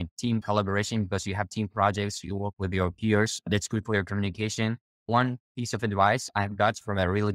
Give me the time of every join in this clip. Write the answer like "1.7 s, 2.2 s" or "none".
none